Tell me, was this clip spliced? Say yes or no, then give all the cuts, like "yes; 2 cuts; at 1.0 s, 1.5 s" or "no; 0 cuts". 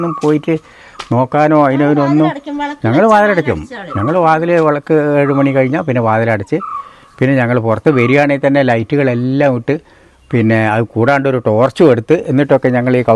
no; 0 cuts